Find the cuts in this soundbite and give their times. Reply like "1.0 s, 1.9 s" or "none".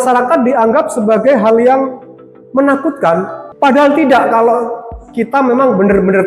3.4 s